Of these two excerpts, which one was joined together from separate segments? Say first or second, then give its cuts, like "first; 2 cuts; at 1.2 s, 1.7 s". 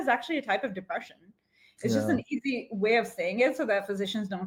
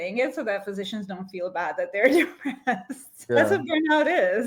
second; 1 cut; at 3.1 s